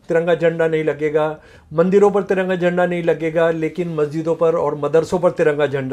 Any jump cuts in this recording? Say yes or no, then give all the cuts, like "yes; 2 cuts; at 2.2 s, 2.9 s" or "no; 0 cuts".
no; 0 cuts